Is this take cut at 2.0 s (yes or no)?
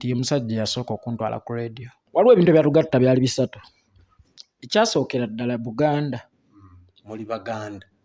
yes